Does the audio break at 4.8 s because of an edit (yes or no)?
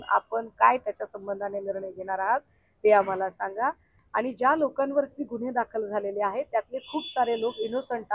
no